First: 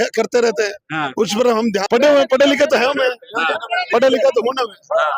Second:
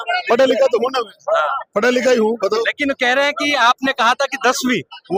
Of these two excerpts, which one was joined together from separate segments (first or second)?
first